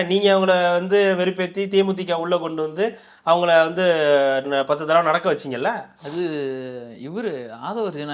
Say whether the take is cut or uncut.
uncut